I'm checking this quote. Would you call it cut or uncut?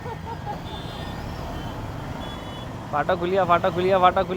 uncut